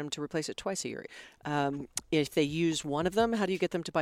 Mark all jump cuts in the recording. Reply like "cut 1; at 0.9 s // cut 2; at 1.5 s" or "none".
cut 1; at 1.0 s